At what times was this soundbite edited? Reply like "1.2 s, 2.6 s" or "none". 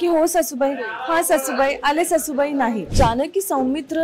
2.9 s